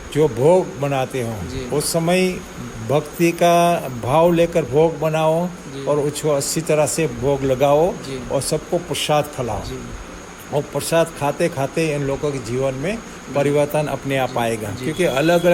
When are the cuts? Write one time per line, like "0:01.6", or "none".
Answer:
none